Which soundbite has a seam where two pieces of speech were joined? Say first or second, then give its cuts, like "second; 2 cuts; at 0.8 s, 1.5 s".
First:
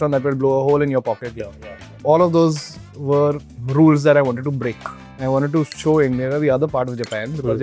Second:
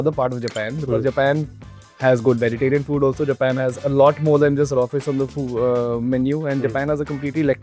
first; 3 cuts; at 1.5 s, 3.5 s, 5.1 s